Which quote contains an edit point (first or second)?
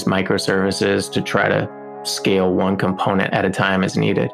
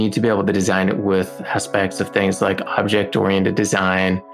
first